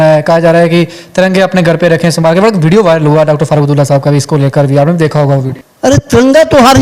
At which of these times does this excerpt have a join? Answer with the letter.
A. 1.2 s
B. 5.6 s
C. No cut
B